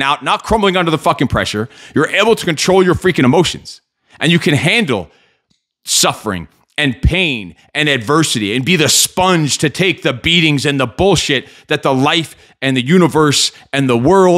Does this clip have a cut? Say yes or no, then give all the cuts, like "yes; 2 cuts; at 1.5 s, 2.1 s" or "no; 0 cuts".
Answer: no; 0 cuts